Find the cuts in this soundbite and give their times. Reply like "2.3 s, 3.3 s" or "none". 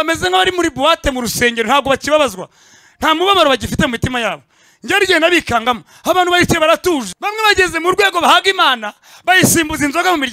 7.2 s